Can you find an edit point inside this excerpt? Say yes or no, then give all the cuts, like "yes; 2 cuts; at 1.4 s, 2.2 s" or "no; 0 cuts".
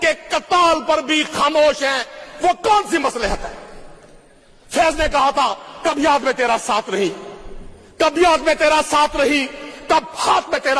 no; 0 cuts